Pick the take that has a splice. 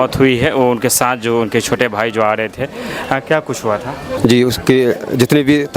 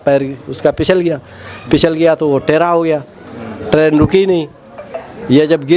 first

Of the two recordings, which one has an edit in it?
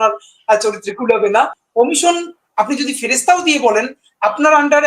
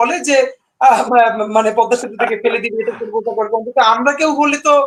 first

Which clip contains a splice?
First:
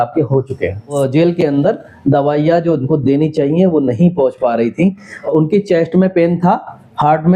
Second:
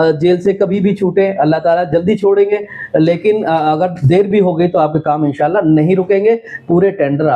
first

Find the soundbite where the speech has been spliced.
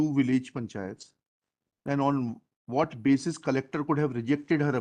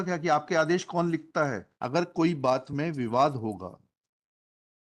second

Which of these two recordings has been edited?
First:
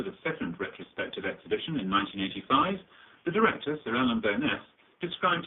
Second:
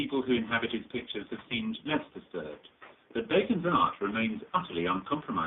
first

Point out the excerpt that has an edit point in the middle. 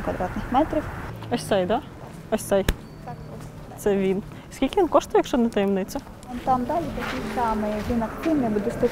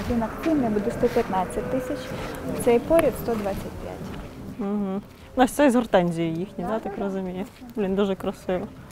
first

